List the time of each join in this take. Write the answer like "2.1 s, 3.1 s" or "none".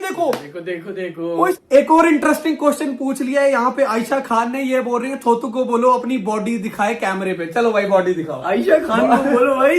1.6 s